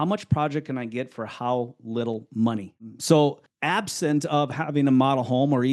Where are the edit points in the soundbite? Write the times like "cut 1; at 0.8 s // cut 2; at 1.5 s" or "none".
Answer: cut 1; at 2.7 s // cut 2; at 3.5 s